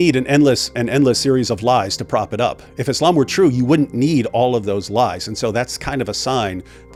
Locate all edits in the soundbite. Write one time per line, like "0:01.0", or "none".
none